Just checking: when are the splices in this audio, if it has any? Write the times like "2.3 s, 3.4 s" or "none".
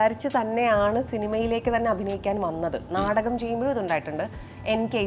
none